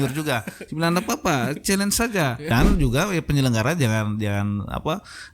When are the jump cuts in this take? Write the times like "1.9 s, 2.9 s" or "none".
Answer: 2.5 s